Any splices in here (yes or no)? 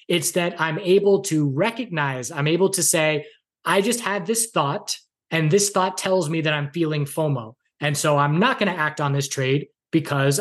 no